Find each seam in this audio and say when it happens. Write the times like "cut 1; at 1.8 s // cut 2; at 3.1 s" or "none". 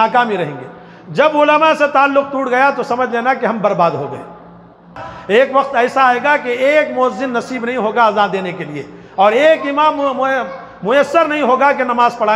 cut 1; at 5.1 s